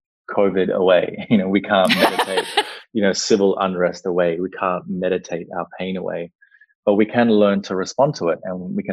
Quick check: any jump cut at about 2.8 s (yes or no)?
no